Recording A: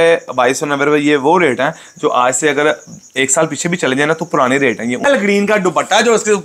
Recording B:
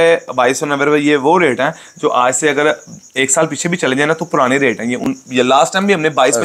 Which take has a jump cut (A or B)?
A